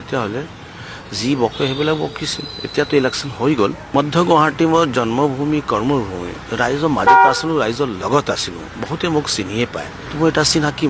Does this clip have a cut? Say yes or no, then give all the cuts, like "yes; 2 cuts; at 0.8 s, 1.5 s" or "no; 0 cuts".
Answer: yes; 2 cuts; at 3.8 s, 10.0 s